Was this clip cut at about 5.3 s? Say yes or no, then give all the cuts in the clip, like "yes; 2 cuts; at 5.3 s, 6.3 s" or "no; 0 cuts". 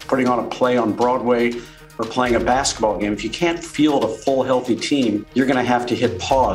yes; 1 cut; at 5.3 s